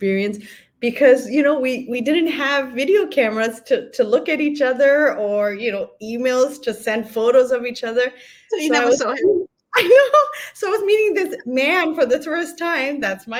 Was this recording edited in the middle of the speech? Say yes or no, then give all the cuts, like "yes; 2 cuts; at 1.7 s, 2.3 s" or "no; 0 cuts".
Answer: no; 0 cuts